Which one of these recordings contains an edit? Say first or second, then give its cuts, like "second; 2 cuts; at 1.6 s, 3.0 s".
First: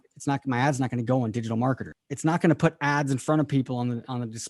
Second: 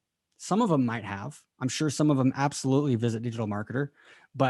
first; 1 cut; at 2.1 s